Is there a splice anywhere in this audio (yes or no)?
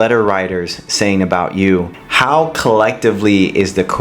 yes